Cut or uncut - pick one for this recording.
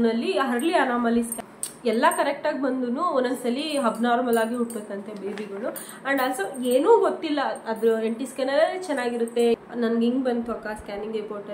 cut